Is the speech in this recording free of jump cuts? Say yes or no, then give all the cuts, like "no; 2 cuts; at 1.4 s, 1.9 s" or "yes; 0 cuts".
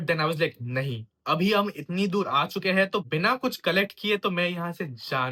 yes; 0 cuts